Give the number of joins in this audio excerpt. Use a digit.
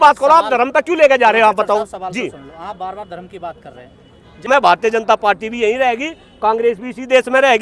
1